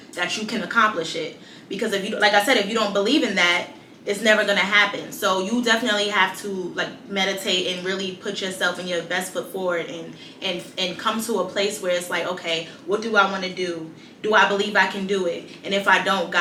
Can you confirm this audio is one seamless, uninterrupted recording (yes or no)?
yes